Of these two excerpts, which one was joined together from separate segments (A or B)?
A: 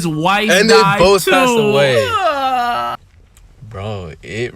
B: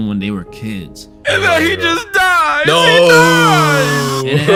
A